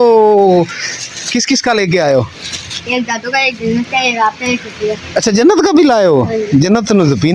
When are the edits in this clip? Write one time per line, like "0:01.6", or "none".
none